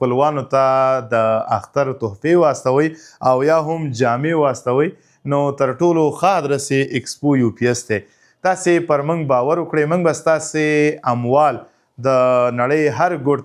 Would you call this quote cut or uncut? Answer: uncut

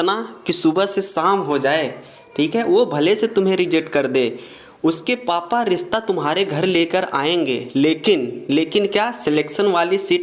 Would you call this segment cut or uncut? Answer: uncut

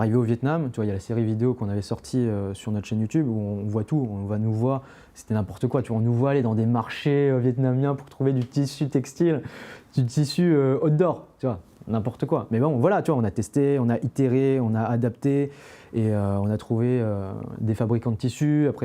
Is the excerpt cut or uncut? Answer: uncut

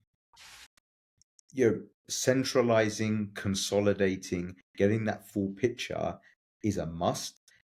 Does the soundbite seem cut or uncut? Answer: uncut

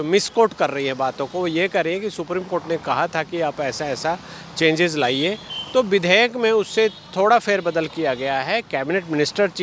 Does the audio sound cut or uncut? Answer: uncut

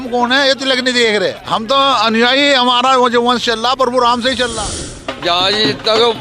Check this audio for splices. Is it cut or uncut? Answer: cut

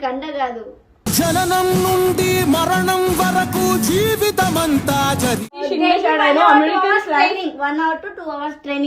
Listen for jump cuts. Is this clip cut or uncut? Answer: cut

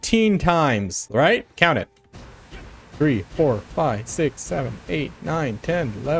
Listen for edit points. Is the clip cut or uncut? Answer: uncut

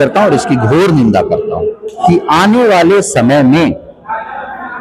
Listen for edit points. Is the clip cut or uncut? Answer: cut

